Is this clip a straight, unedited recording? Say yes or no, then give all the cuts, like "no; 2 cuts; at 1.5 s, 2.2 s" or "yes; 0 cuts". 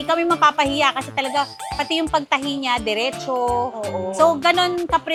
yes; 0 cuts